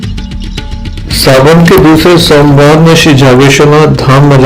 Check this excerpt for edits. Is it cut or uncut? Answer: cut